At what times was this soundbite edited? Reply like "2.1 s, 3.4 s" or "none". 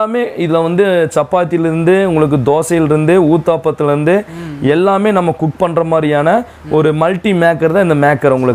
none